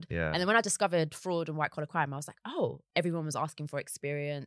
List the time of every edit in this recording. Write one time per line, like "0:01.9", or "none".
0:02.8